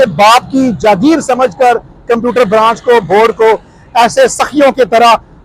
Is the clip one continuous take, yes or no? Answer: yes